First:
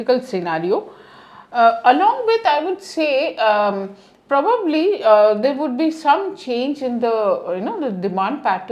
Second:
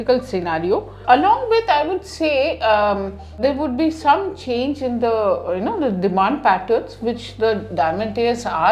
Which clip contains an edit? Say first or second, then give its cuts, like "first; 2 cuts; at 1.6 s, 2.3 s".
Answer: second; 2 cuts; at 1.0 s, 3.4 s